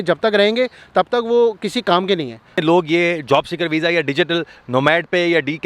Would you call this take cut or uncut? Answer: cut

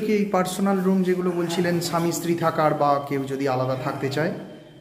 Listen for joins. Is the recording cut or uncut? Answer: uncut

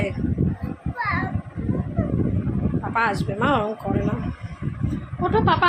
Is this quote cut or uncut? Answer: uncut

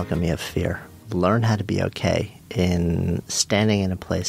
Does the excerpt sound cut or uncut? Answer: cut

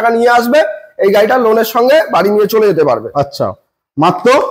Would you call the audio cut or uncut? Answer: uncut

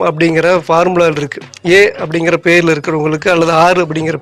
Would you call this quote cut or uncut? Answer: uncut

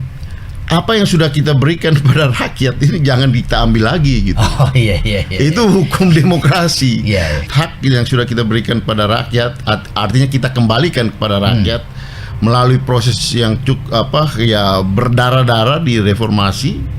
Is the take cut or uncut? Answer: cut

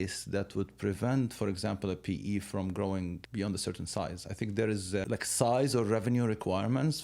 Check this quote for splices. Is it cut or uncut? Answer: cut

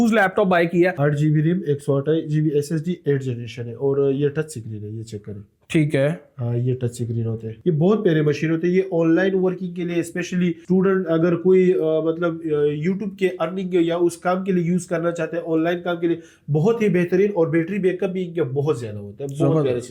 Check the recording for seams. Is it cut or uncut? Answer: uncut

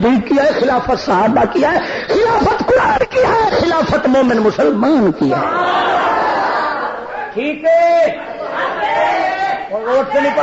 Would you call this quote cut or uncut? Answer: uncut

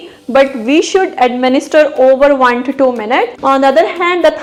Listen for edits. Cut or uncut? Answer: uncut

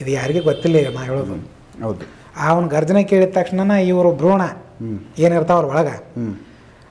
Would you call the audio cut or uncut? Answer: uncut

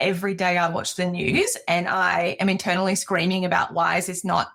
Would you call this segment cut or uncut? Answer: uncut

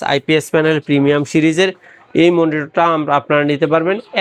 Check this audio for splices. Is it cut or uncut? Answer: uncut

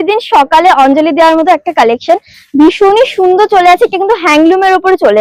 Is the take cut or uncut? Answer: uncut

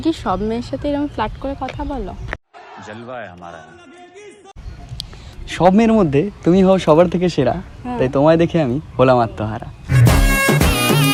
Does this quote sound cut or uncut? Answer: uncut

